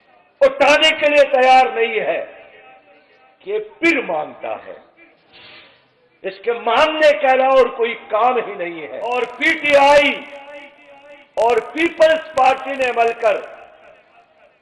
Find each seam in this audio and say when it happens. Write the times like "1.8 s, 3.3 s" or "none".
9.1 s